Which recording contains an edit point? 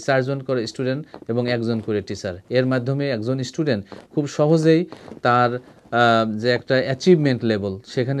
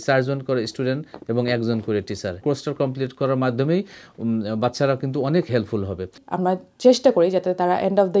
second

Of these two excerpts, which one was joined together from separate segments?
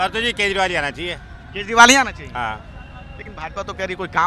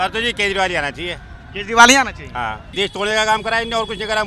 second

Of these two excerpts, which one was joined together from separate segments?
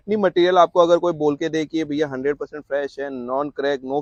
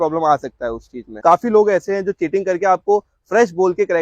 second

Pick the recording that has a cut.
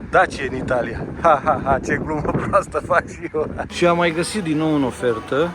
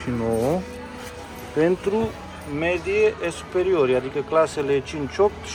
first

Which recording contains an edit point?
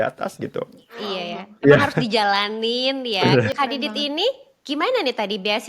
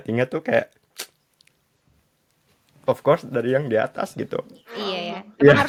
first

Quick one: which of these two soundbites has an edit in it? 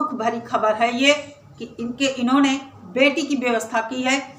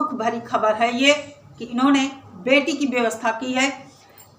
second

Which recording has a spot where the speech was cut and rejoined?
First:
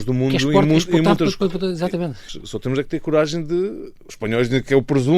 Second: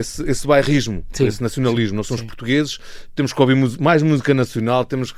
first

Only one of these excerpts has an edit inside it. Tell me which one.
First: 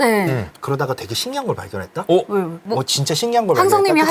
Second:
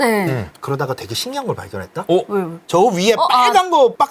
second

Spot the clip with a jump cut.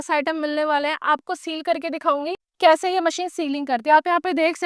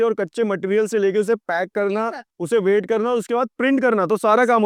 first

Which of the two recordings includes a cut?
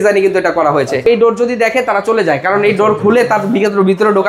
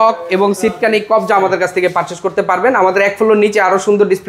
first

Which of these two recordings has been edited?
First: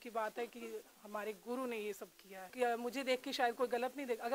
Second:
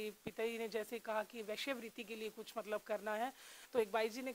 first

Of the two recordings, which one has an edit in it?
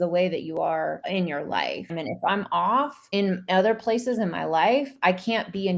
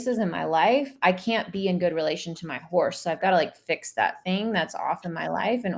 first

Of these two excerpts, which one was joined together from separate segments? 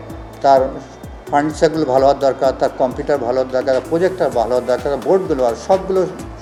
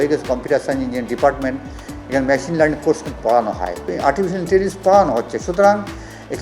second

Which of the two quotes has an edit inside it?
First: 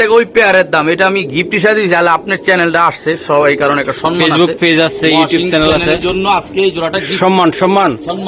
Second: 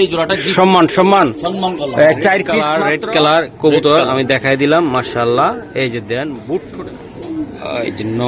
second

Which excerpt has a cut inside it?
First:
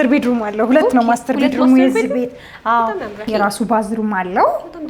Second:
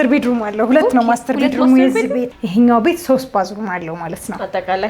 second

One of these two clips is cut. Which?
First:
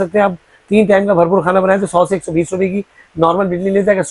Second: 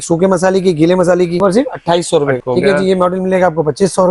second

